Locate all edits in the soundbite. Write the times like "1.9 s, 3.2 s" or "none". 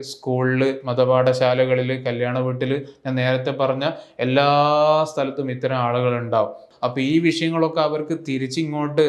6.7 s

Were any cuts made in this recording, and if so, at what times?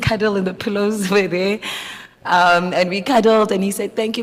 none

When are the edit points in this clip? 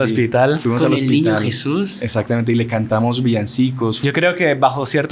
4.0 s

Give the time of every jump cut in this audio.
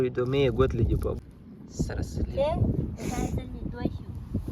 1.2 s

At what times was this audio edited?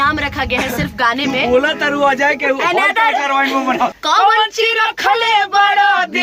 4.0 s

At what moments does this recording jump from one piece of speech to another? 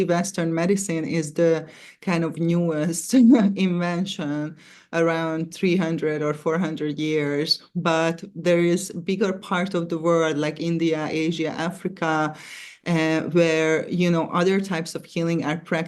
none

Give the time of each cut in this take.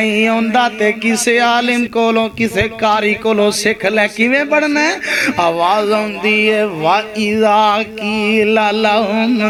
none

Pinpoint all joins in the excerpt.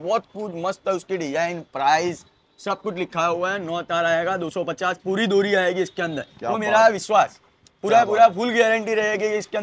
none

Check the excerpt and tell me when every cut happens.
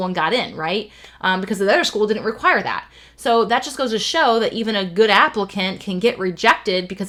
none

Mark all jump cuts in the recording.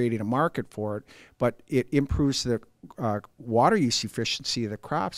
none

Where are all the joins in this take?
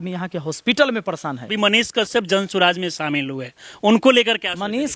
1.5 s

